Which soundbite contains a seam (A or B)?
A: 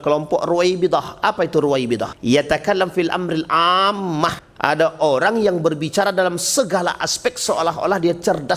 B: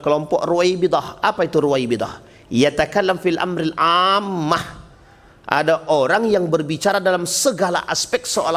A